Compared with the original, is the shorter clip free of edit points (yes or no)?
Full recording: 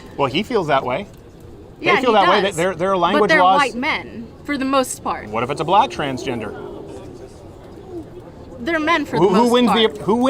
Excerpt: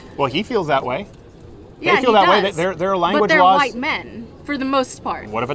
yes